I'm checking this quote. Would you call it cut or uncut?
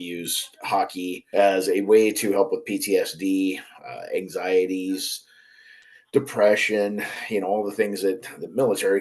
cut